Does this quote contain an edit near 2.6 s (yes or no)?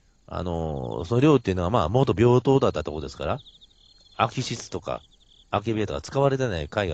yes